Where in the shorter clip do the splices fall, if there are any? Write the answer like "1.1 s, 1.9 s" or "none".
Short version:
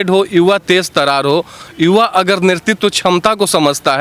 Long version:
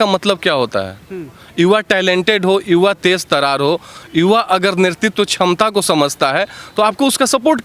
none